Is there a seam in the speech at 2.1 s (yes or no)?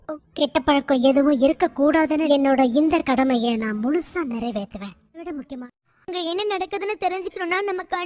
no